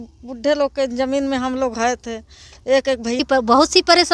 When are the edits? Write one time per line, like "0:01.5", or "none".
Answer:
0:03.2